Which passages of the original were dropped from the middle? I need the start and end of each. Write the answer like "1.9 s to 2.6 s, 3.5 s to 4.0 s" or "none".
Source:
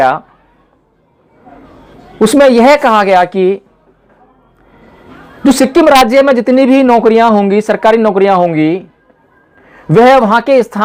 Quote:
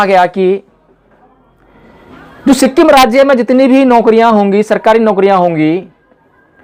none